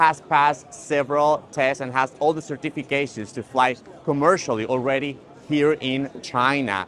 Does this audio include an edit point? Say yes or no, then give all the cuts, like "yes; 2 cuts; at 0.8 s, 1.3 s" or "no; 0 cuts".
no; 0 cuts